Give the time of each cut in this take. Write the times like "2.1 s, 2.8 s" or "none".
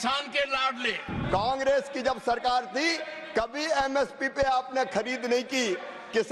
1.1 s